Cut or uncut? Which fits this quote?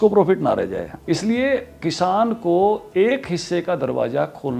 cut